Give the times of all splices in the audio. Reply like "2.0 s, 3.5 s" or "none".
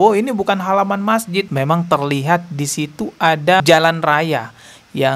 1.5 s